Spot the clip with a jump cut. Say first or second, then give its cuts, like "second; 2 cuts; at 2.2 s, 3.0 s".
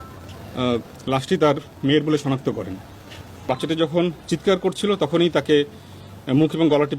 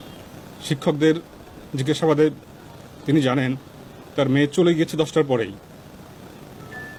first; 1 cut; at 3.3 s